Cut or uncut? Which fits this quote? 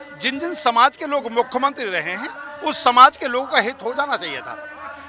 uncut